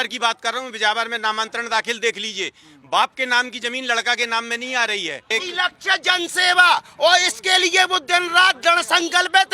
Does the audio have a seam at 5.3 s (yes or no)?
yes